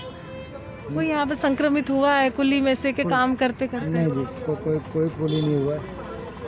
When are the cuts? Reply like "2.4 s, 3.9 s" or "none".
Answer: none